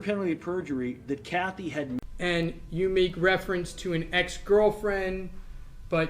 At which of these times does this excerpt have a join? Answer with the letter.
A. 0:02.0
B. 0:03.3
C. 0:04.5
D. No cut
A